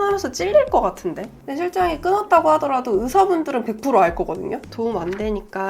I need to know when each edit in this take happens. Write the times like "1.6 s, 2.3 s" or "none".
4.6 s